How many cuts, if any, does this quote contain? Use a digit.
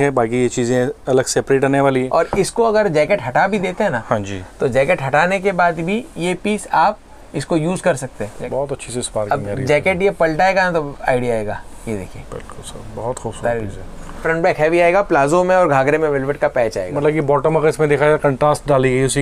2